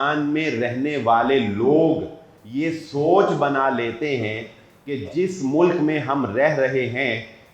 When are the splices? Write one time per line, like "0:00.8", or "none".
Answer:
none